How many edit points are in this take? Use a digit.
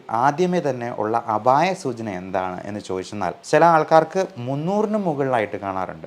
1